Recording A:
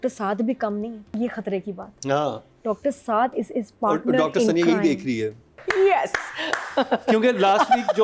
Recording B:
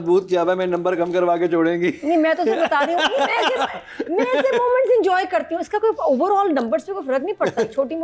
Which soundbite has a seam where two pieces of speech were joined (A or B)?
A